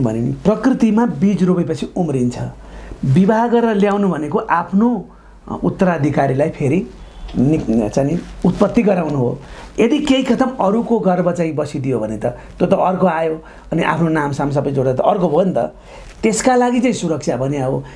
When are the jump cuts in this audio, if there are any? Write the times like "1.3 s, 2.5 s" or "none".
none